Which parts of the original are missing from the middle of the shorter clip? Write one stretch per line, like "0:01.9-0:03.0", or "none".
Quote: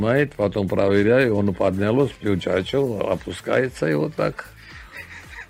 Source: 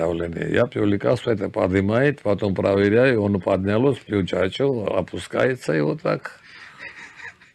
none